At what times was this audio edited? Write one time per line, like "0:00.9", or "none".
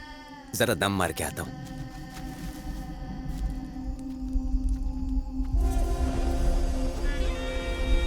none